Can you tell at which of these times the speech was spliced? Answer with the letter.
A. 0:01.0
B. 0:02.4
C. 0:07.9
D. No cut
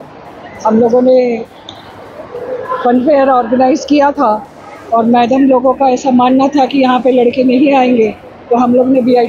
D